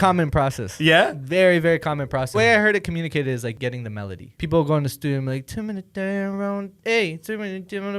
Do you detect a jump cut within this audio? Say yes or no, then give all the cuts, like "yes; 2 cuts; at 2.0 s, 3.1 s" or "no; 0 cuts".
yes; 2 cuts; at 2.4 s, 4.0 s